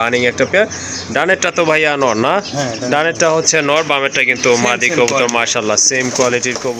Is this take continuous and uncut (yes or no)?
yes